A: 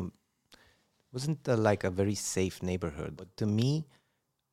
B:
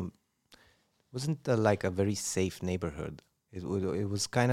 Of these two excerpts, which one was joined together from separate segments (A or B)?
A